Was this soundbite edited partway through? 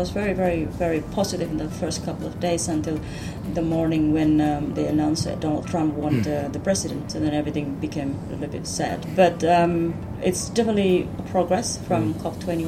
yes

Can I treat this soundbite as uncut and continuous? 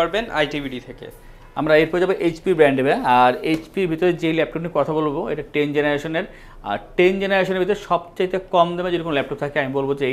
yes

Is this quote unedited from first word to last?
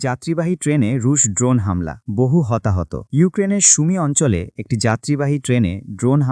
yes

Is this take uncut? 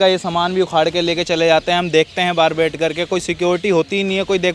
yes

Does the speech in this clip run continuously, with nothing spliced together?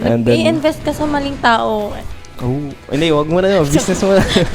yes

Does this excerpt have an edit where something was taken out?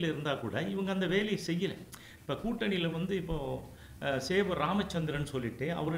no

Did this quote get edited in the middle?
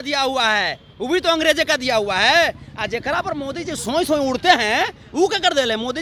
no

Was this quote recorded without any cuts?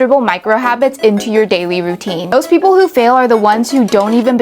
no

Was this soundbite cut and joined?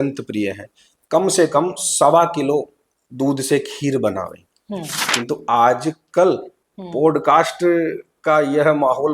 yes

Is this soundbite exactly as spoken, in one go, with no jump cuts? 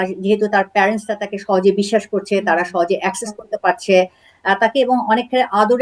yes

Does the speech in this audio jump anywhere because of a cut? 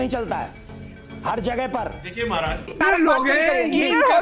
yes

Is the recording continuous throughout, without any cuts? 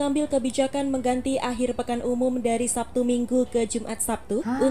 yes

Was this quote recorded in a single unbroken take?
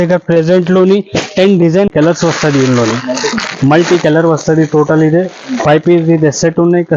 no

